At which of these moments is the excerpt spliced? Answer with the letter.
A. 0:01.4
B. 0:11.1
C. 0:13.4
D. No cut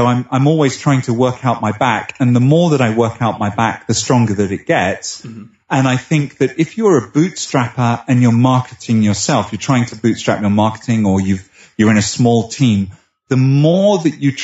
D